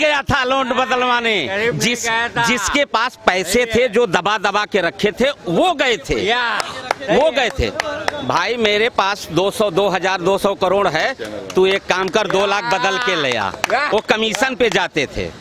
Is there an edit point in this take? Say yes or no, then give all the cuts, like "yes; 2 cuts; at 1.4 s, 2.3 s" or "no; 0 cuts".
no; 0 cuts